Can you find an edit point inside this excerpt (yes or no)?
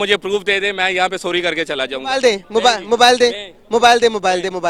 no